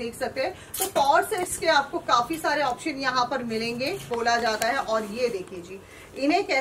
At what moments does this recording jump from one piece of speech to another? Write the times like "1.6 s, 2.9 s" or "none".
4.1 s